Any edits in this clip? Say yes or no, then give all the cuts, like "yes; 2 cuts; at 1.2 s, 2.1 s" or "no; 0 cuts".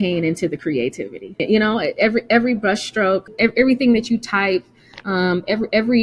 yes; 2 cuts; at 1.4 s, 3.3 s